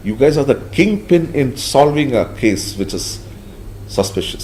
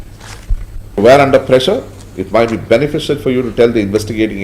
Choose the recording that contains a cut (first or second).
second